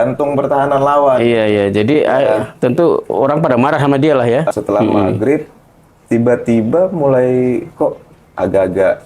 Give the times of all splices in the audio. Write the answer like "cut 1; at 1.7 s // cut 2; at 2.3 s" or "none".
cut 1; at 4.5 s